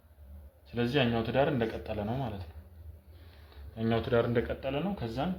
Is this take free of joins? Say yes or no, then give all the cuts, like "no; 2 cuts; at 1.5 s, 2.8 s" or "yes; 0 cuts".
yes; 0 cuts